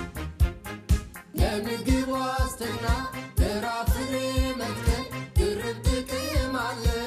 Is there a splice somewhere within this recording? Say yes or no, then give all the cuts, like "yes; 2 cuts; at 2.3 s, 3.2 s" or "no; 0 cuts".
no; 0 cuts